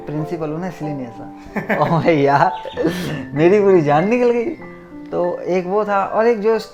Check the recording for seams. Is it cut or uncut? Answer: uncut